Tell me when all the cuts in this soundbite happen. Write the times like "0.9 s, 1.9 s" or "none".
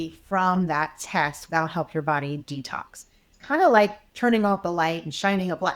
1.4 s